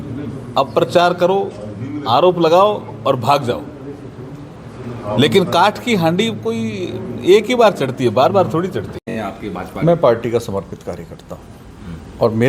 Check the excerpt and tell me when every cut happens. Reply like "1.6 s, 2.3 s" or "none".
9.1 s